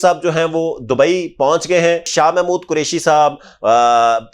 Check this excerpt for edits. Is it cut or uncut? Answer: cut